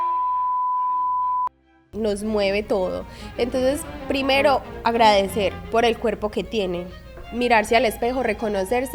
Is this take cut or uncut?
uncut